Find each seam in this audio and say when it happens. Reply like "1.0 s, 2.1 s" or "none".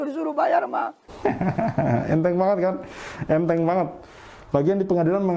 1.0 s